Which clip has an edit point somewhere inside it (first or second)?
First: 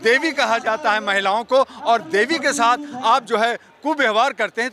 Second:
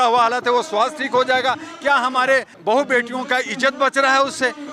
second